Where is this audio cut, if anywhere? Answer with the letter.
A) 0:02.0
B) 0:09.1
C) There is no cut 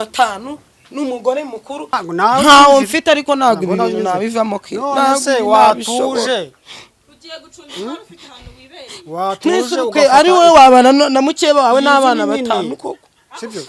A